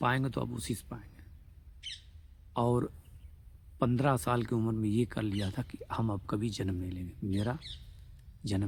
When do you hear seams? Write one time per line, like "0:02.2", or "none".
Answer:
none